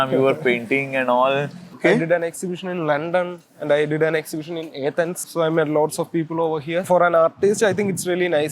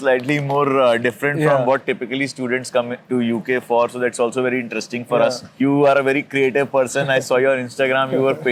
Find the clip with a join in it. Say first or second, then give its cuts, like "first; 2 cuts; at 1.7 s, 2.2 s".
first; 3 cuts; at 1.8 s, 5.3 s, 6.9 s